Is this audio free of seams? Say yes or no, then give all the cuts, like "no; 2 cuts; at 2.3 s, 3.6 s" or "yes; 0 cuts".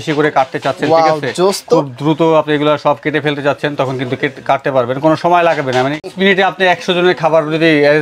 yes; 0 cuts